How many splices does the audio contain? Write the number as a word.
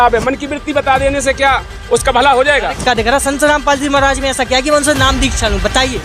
one